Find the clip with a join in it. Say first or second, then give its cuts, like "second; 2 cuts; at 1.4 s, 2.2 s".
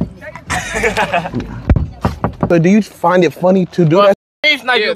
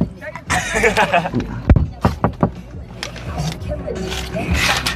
first; 1 cut; at 2.4 s